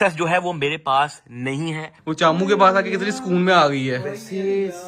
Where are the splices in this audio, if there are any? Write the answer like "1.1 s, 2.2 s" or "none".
1.9 s